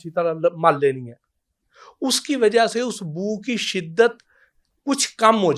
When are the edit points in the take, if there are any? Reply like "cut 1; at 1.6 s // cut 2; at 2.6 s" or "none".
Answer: none

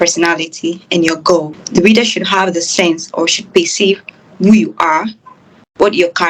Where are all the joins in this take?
cut 1; at 1.6 s

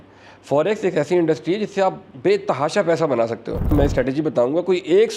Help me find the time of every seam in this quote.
cut 1; at 2.1 s // cut 2; at 3.7 s

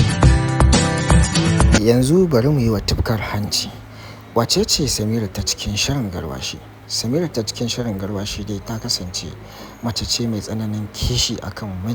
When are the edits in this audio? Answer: cut 1; at 1.7 s

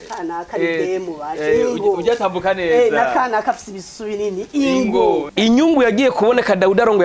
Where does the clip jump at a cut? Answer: cut 1; at 5.3 s

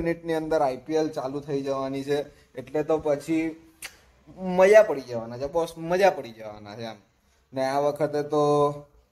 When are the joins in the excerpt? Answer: none

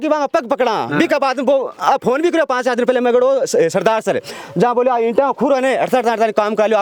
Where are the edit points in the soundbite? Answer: none

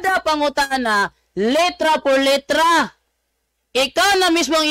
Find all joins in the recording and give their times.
none

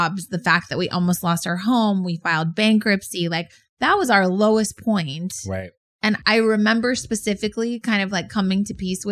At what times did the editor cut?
cut 1; at 6.2 s

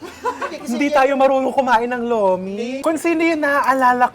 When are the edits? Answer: cut 1; at 2.8 s

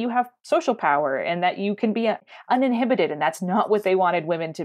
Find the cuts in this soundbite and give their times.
none

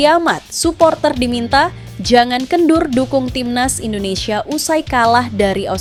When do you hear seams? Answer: none

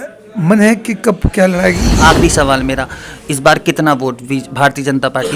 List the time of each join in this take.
cut 1; at 1.9 s

